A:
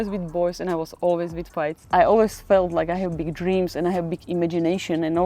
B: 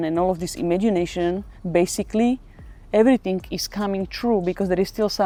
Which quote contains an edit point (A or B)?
A